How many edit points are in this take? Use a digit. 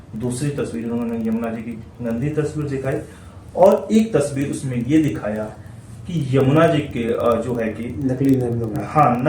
0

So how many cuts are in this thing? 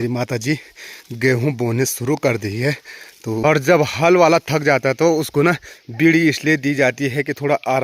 1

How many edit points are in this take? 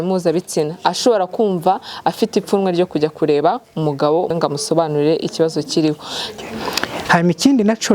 2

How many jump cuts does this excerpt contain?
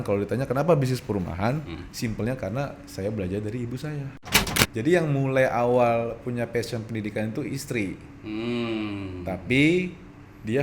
1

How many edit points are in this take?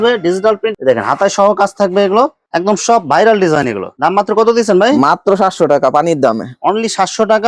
0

